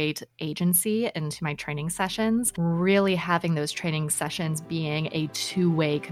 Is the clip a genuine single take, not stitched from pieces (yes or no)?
no